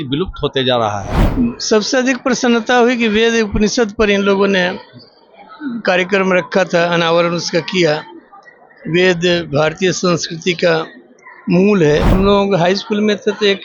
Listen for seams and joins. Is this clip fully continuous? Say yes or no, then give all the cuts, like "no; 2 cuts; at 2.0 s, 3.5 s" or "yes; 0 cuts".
no; 2 cuts; at 1.2 s, 12.1 s